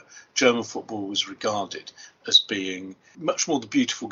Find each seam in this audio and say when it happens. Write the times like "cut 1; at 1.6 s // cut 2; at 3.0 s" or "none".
cut 1; at 3.1 s